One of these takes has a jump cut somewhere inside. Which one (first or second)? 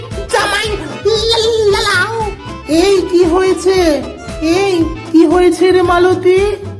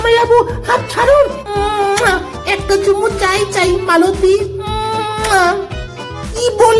second